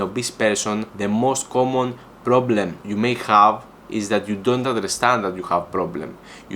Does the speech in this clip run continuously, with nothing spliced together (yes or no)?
no